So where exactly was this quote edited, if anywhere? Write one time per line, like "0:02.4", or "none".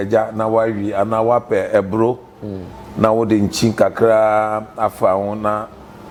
none